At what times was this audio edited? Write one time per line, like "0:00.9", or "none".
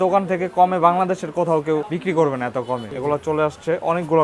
0:01.9
0:02.9